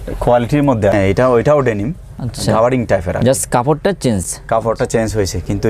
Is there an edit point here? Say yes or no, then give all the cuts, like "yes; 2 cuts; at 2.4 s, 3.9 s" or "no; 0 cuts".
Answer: yes; 1 cut; at 0.9 s